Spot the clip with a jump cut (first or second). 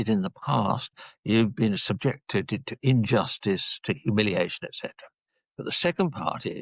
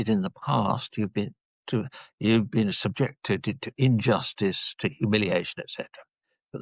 first